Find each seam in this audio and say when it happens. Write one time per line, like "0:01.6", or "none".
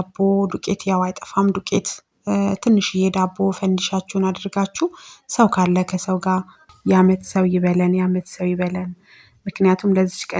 0:06.6

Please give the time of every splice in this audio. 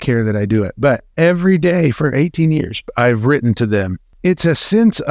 0:02.9
0:04.0

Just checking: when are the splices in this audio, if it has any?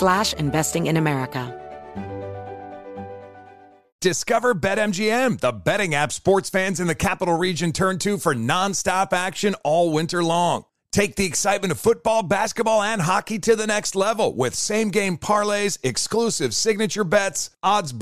0:01.5

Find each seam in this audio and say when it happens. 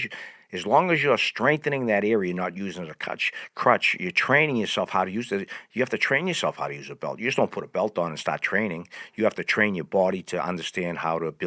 none

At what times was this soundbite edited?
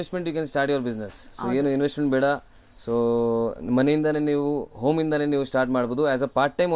none

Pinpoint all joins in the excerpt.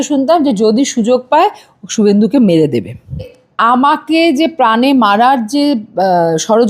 0:03.4

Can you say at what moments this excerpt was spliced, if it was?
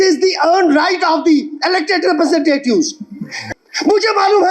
0:03.5

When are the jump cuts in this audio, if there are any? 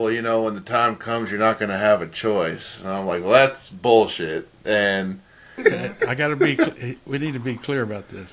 0:05.6

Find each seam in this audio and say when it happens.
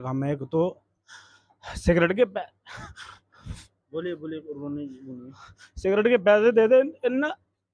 none

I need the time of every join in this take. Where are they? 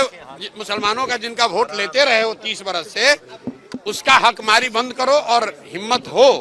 none

